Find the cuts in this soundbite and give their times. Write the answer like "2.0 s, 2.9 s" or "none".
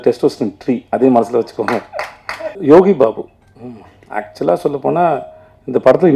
2.6 s